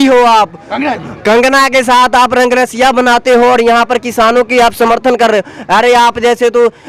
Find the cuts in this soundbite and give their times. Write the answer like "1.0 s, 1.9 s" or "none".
none